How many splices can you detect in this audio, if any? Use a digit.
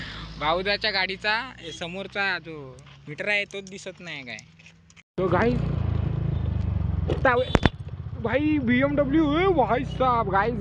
1